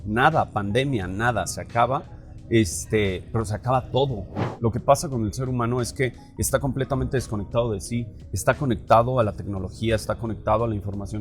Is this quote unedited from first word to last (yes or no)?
no